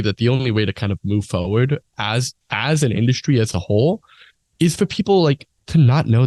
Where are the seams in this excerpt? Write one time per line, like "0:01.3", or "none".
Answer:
none